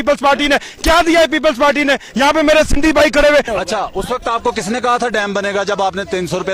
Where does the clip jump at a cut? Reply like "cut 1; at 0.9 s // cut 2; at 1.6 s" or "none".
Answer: cut 1; at 3.5 s